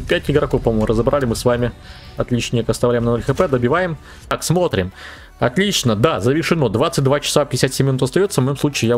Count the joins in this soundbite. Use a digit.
1